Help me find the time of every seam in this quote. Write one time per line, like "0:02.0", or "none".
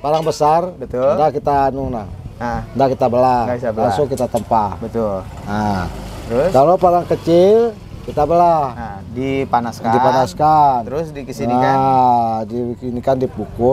none